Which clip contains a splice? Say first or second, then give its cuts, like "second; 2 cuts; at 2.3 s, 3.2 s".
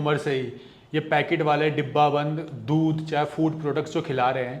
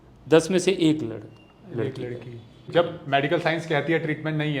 second; 1 cut; at 2.7 s